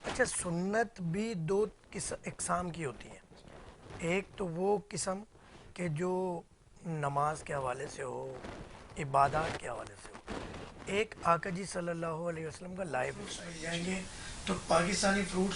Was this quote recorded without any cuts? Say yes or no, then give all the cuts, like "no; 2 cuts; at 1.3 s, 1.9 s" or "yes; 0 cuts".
no; 1 cut; at 13.5 s